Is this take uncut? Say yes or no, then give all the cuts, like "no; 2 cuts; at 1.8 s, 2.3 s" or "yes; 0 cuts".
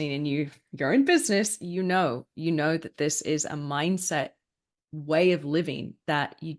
yes; 0 cuts